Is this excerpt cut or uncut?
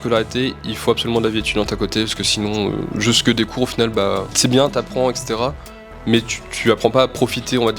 uncut